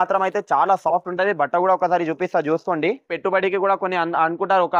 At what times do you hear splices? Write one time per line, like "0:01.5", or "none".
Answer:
0:03.1